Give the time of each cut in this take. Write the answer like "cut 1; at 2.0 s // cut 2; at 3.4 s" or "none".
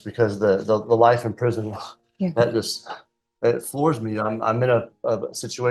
none